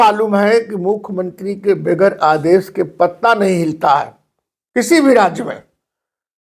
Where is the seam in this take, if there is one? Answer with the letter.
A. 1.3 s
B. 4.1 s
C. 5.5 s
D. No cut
D